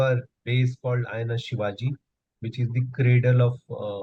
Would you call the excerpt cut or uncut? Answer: uncut